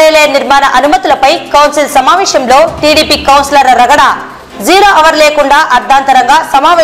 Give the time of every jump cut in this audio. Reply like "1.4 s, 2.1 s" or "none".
none